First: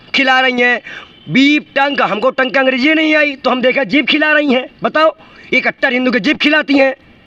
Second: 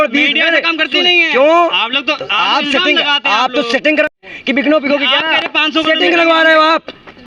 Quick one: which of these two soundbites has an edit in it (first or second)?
second